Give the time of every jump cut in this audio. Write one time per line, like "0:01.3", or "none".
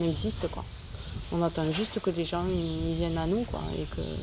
none